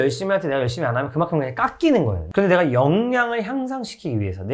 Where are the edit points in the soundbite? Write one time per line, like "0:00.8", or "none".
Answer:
0:02.2